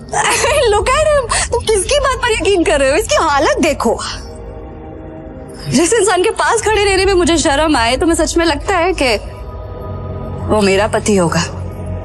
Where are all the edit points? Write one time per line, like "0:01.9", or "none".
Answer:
none